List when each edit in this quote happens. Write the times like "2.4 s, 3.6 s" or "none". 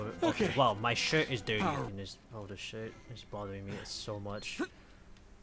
1.9 s